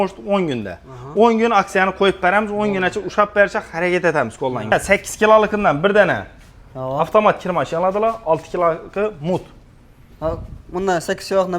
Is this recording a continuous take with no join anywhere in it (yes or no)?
no